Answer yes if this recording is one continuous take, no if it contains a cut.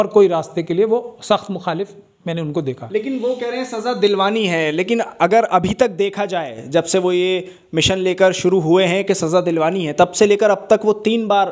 yes